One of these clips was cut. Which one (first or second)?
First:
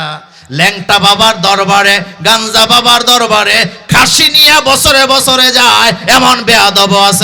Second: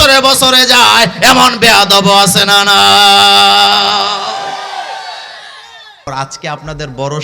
second